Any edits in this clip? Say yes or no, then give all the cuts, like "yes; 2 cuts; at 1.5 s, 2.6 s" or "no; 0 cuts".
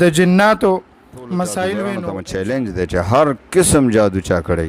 yes; 1 cut; at 2.1 s